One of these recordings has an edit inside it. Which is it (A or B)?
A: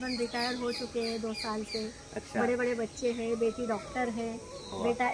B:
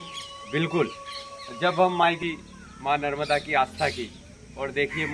B